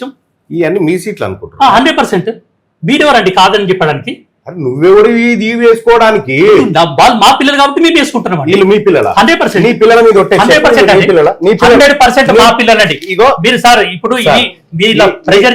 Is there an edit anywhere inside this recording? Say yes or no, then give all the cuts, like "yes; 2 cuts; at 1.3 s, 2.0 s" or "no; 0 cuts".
no; 0 cuts